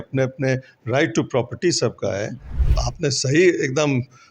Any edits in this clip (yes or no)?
yes